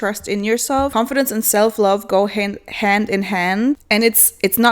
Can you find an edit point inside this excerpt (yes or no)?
yes